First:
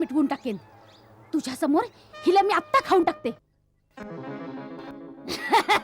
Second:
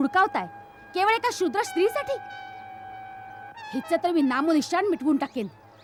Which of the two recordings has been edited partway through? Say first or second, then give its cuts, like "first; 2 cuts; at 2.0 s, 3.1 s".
first; 1 cut; at 3.4 s